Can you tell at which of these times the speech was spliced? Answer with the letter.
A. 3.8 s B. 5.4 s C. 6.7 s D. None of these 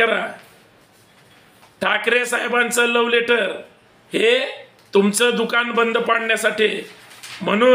D